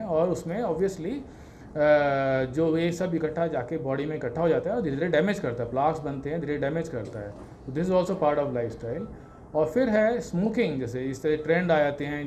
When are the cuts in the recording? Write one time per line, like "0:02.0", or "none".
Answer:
none

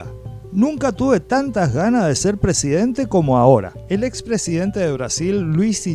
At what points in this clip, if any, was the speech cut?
none

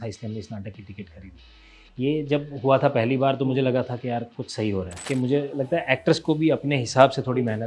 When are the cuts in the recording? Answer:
0:05.0

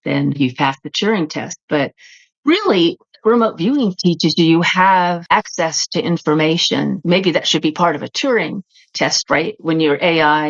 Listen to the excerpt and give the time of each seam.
0:05.2
0:07.0

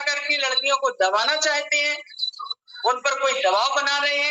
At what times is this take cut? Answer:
none

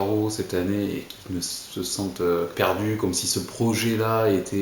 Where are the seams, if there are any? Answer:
0:02.5

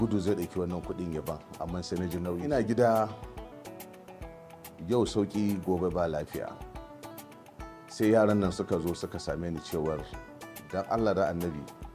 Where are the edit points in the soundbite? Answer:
0:02.4

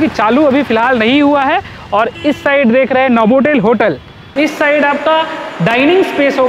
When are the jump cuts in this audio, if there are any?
0:04.2

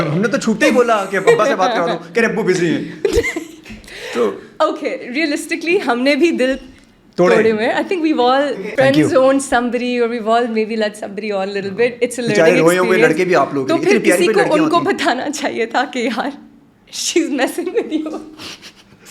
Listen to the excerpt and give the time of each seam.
0:08.5

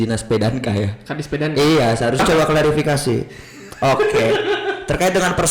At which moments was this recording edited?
0:02.2

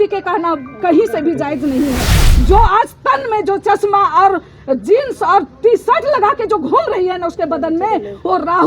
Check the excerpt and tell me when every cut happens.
0:02.2

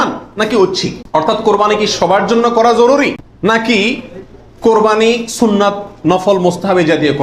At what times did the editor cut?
0:01.0
0:03.3

